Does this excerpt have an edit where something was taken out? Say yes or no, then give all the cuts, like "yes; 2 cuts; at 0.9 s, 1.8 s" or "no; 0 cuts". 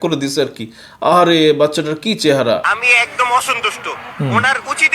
yes; 1 cut; at 2.7 s